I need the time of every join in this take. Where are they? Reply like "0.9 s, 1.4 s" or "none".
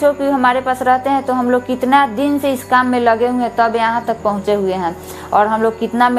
none